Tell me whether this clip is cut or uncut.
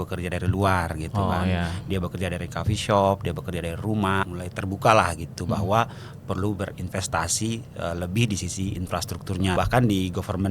cut